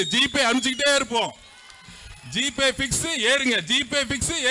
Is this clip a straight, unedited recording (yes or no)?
yes